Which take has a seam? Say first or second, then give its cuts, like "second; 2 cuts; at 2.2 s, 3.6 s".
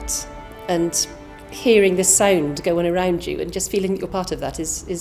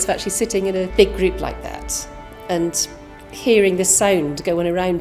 second; 1 cut; at 0.9 s